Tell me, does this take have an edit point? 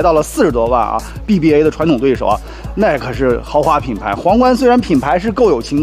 yes; 1 cut; at 1.1 s

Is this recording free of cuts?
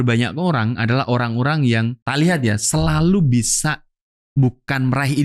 no; 1 cut; at 2.0 s

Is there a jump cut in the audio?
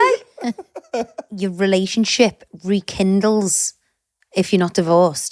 yes; 1 cut; at 1.2 s

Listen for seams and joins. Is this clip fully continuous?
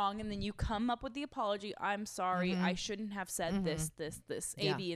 yes; 0 cuts

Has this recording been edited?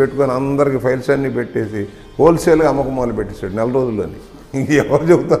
no; 0 cuts

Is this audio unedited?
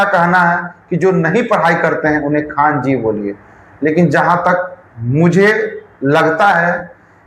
yes; 0 cuts

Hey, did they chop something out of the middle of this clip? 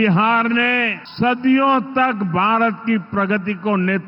yes; 1 cut; at 1.0 s

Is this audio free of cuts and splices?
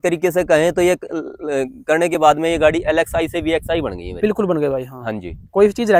yes; 0 cuts

